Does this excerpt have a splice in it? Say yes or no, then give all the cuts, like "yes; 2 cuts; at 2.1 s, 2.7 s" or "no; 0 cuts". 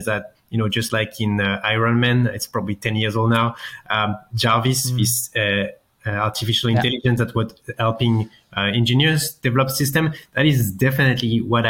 no; 0 cuts